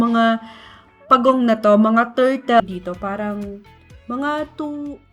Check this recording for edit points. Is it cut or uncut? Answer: cut